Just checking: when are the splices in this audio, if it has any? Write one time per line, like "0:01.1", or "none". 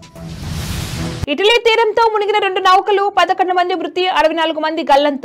0:01.3